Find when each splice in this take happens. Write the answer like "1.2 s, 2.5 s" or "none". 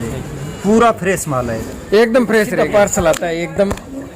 2.6 s